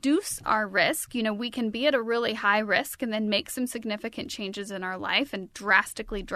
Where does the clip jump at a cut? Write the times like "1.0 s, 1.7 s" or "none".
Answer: none